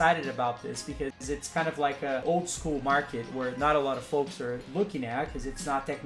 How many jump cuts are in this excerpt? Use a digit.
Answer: 2